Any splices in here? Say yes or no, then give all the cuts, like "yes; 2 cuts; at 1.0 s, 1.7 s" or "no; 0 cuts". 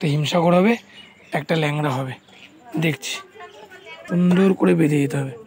yes; 1 cut; at 4.0 s